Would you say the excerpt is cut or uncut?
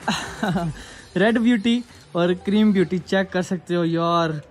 uncut